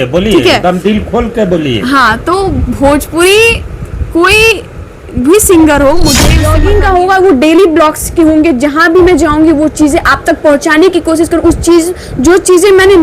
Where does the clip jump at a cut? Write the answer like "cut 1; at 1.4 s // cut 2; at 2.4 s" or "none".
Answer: cut 1; at 6.4 s